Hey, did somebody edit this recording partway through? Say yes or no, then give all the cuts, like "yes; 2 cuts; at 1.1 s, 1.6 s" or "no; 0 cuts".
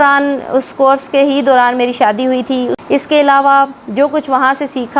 yes; 1 cut; at 2.7 s